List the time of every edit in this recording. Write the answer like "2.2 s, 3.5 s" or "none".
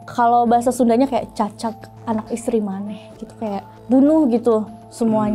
3.7 s